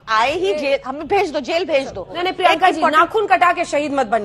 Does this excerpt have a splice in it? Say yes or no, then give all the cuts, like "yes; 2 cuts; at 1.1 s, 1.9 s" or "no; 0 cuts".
yes; 1 cut; at 2.2 s